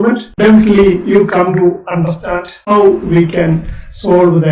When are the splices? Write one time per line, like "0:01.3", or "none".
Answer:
none